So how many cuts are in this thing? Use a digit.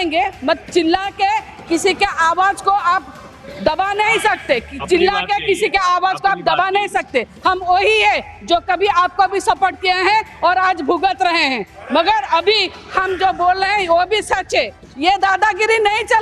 1